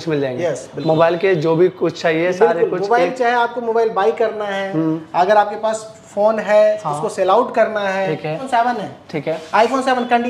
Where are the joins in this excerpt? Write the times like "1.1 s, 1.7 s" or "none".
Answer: 8.4 s